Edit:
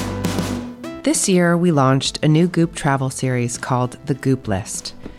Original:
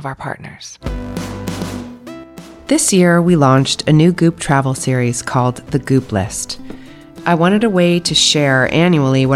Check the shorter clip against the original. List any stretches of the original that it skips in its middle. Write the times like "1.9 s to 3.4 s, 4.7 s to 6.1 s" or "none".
2.2 s to 2.6 s